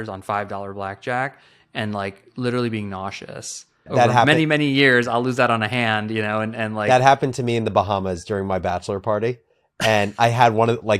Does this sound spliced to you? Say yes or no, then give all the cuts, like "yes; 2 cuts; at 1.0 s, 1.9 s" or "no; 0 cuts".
yes; 1 cut; at 3.9 s